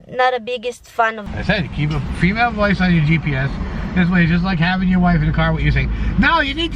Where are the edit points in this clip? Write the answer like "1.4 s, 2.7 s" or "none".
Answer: 1.2 s